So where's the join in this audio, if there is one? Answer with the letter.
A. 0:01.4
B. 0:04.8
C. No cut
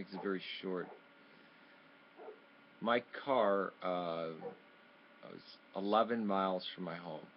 B